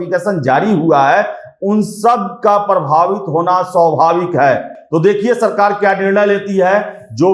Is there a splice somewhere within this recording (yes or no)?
no